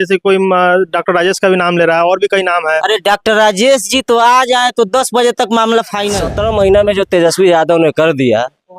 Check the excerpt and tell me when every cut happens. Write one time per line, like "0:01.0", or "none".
0:06.2